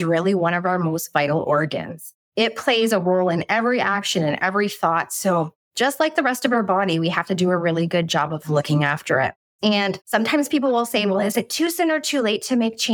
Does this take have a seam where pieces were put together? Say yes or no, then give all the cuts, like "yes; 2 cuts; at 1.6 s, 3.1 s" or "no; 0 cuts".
no; 0 cuts